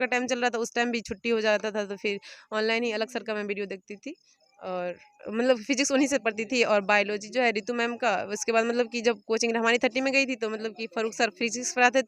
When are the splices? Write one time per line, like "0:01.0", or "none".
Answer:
none